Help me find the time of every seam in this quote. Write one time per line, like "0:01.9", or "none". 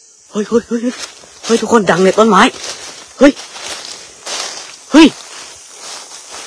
none